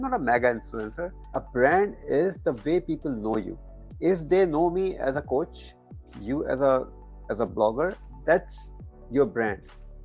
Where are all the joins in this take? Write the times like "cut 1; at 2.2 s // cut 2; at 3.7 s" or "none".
cut 1; at 1.4 s // cut 2; at 3.9 s

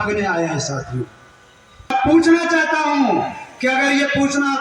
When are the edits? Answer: cut 1; at 1.9 s

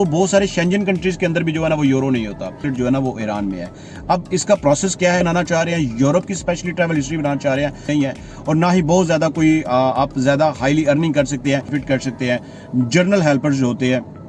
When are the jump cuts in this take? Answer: cut 1; at 2.6 s // cut 2; at 5.2 s // cut 3; at 7.9 s // cut 4; at 11.7 s

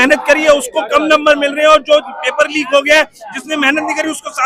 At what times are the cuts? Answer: none

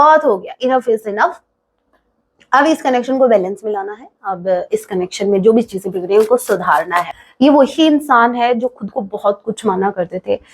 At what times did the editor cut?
cut 1; at 7.2 s

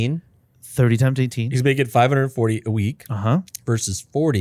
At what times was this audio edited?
none

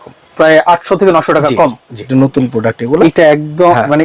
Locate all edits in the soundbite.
cut 1; at 2.0 s

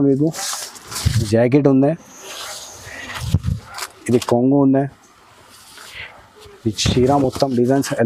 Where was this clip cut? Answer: cut 1; at 1.2 s

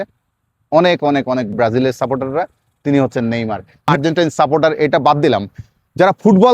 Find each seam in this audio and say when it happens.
cut 1; at 1.5 s // cut 2; at 3.9 s

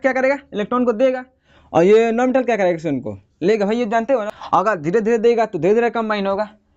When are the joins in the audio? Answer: cut 1; at 4.3 s

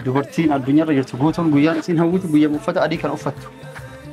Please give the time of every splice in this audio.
none

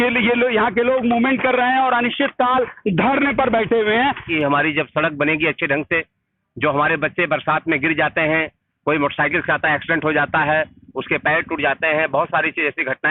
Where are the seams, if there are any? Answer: cut 1; at 4.3 s

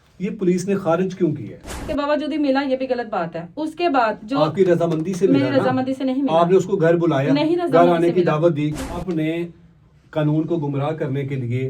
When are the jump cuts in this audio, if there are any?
cut 1; at 1.9 s // cut 2; at 8.9 s

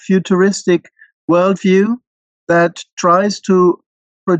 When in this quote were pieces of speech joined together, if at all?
cut 1; at 1.1 s

